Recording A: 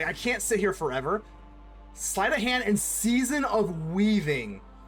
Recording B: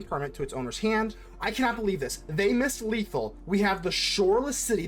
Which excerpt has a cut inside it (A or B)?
B